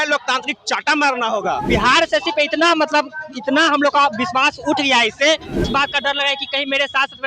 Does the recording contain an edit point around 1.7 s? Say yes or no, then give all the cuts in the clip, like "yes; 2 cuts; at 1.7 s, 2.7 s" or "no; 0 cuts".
yes; 2 cuts; at 1.7 s, 5.7 s